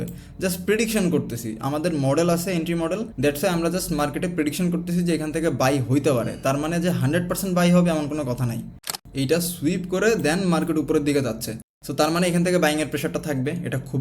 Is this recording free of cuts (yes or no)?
no